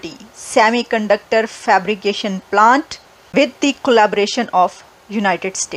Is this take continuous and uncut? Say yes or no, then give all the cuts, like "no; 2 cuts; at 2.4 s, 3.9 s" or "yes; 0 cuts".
yes; 0 cuts